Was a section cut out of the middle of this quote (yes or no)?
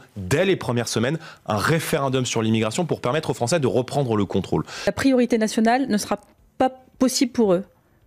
yes